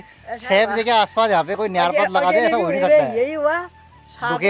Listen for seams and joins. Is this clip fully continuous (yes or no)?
yes